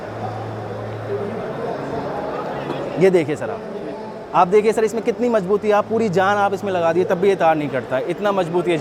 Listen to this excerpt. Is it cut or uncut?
uncut